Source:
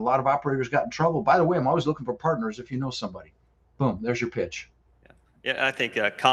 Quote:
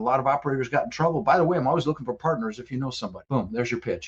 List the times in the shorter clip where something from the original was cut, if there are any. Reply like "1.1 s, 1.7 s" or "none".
3.2 s